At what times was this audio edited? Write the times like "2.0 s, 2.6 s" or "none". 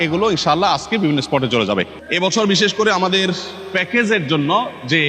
1.9 s